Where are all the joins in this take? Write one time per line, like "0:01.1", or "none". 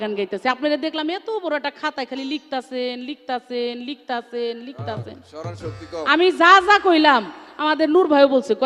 none